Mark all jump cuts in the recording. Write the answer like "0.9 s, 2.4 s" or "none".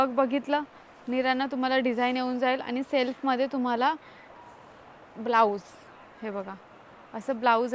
none